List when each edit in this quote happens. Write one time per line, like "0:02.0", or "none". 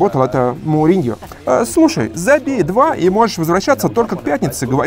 0:01.2